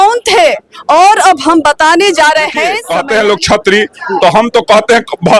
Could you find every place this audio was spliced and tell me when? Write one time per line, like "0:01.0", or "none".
0:02.8